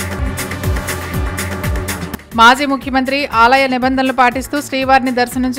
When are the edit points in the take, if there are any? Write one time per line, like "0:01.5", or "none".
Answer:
0:02.0